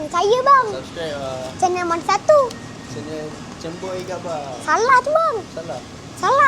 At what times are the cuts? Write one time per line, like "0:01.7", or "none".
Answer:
0:01.4